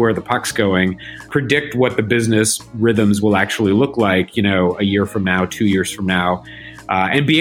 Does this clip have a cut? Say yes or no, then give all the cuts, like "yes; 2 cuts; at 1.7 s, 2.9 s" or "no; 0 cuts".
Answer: yes; 1 cut; at 1.2 s